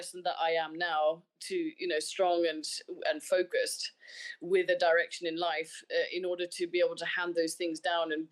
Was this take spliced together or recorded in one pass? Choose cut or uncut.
uncut